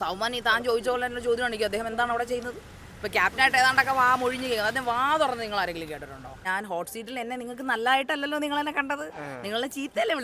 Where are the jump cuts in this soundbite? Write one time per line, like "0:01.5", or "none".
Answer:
0:06.4